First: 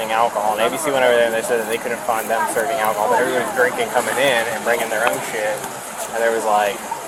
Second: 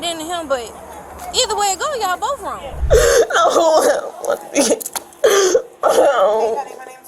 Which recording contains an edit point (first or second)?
second